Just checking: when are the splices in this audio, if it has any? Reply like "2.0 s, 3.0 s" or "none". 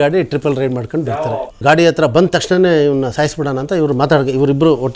1.5 s